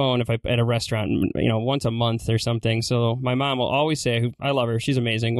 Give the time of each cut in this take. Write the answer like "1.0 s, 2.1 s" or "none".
none